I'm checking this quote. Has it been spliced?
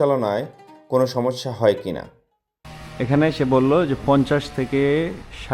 yes; 1 cut; at 2.1 s

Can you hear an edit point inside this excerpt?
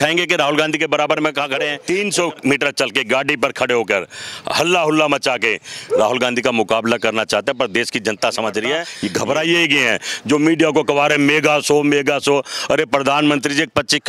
yes; 2 cuts; at 1.8 s, 8.9 s

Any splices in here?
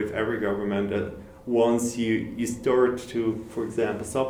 no; 0 cuts

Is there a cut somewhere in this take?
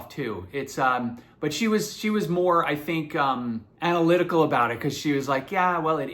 yes; 1 cut; at 3.7 s

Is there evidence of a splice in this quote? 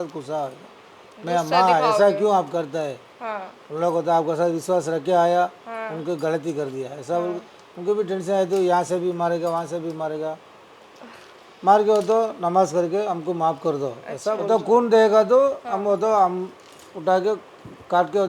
yes; 1 cut; at 14.4 s

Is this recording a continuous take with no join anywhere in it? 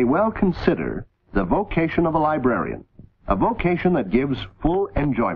no; 1 cut; at 2.5 s

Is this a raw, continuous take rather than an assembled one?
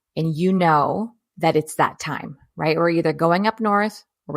no; 1 cut; at 1.2 s

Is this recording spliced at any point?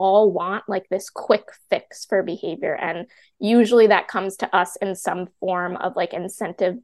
no; 0 cuts

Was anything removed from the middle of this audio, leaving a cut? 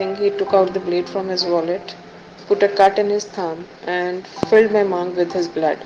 no; 0 cuts

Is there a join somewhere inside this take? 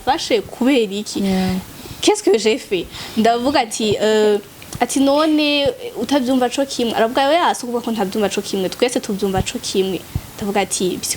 no; 0 cuts

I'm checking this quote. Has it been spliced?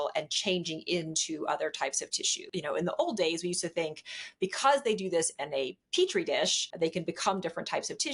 yes; 2 cuts; at 2.5 s, 6.6 s

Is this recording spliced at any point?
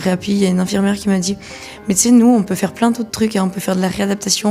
no; 0 cuts

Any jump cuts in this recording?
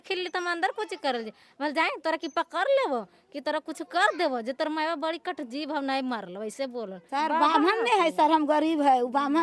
yes; 1 cut; at 7.0 s

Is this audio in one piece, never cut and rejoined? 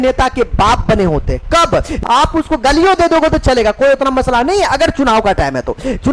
no; 1 cut; at 2.0 s

